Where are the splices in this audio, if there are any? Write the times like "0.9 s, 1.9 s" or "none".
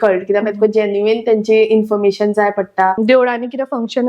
3.0 s